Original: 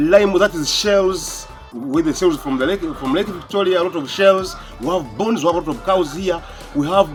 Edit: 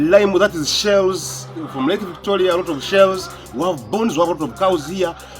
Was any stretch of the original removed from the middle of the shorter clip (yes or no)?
yes